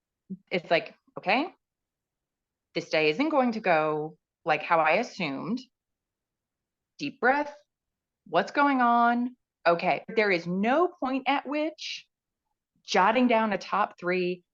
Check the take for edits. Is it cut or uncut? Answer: cut